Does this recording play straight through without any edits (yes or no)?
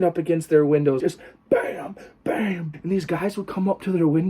no